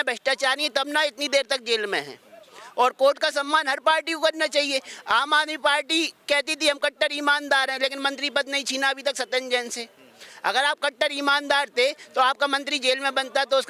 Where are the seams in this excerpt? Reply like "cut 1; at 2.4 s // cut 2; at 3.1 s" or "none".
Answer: none